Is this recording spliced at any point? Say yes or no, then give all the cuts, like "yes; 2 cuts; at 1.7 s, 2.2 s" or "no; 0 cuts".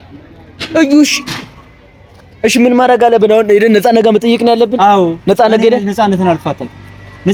no; 0 cuts